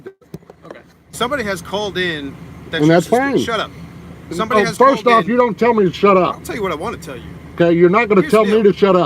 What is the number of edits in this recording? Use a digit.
1